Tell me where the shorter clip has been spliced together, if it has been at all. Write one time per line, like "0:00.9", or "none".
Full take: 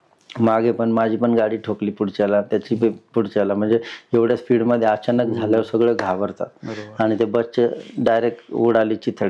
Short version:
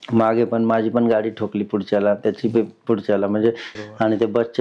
0:03.7